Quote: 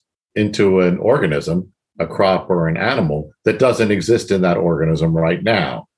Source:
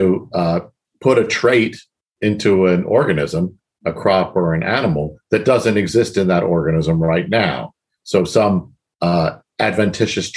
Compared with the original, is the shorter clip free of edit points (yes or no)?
yes